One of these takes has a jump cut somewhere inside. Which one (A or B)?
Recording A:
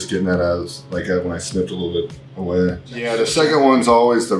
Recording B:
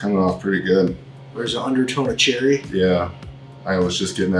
A